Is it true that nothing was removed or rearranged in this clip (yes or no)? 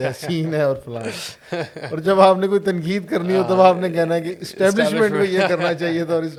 yes